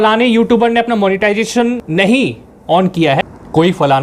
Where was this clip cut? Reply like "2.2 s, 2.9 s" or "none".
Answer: 1.8 s, 3.2 s